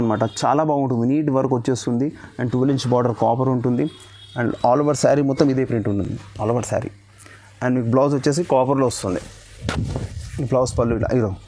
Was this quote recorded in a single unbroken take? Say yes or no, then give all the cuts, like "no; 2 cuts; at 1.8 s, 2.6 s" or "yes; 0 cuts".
yes; 0 cuts